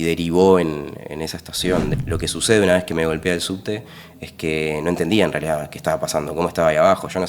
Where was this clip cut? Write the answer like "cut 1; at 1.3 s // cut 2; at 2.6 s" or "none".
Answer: cut 1; at 1.9 s